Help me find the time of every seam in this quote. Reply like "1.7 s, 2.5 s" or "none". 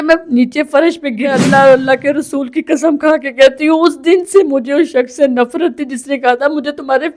1.4 s